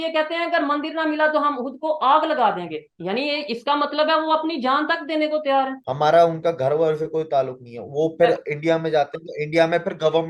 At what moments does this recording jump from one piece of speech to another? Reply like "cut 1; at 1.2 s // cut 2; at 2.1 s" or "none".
cut 1; at 5.8 s

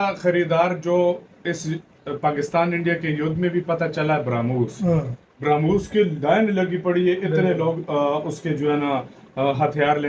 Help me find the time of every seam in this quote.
none

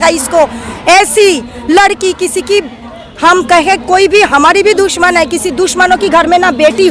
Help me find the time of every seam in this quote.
none

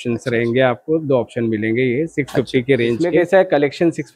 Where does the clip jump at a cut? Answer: cut 1; at 3.2 s

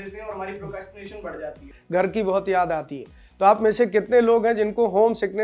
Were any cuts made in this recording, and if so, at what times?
cut 1; at 1.7 s

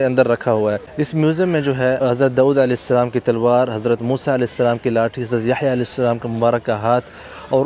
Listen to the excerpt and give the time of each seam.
cut 1; at 0.9 s // cut 2; at 2.0 s

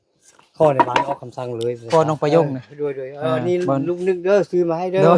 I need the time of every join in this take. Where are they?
cut 1; at 1.8 s

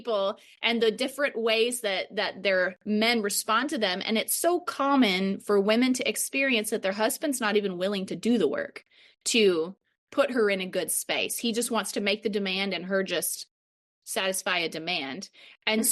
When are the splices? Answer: none

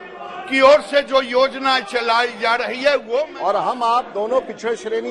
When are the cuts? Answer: cut 1; at 3.3 s

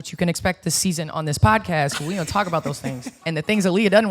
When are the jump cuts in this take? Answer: cut 1; at 3.1 s

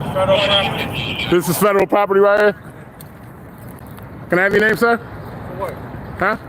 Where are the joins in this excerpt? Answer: none

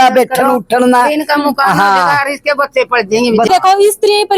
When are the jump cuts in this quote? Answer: cut 1; at 3.5 s

